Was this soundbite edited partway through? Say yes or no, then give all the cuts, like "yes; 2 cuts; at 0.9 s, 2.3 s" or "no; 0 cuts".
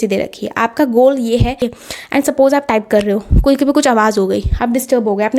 yes; 1 cut; at 1.7 s